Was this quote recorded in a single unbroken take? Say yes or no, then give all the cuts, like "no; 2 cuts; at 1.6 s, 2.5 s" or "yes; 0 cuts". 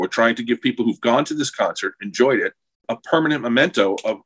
no; 1 cut; at 2.9 s